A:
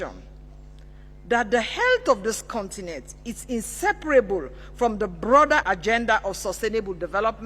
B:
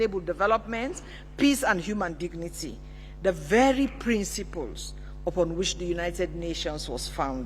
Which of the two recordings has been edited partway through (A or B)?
A